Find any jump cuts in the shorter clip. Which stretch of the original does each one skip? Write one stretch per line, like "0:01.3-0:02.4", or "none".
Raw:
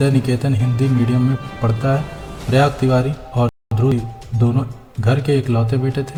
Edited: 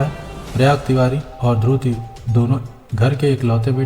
0:03.8-0:03.9